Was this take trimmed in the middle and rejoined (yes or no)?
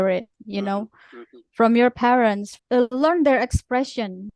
yes